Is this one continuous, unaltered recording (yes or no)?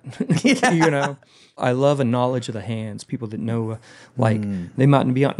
no